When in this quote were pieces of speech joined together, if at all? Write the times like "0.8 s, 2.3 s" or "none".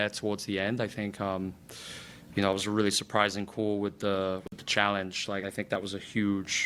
none